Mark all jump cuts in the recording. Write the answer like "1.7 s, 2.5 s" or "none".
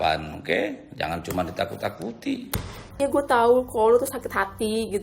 2.8 s